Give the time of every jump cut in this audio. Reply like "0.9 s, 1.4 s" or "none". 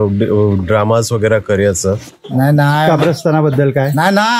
2.1 s